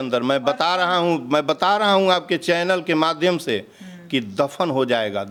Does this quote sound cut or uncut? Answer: uncut